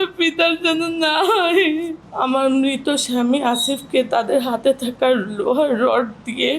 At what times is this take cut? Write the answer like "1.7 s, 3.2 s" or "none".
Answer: 1.9 s